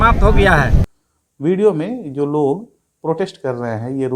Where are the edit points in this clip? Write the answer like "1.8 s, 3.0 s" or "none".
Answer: none